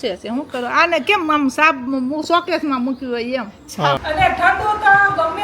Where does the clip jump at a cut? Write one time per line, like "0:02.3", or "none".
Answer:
0:04.0